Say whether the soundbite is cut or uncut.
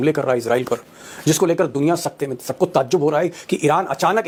uncut